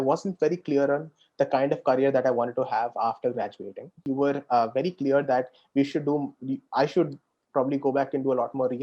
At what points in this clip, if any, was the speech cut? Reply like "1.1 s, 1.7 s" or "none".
4.0 s